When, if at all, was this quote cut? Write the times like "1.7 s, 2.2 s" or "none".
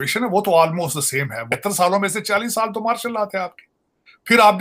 1.5 s